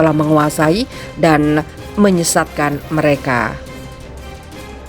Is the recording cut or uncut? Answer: cut